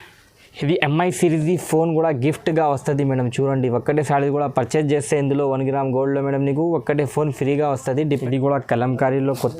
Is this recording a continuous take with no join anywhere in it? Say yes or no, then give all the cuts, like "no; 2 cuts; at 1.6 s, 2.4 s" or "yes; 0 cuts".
no; 1 cut; at 8.2 s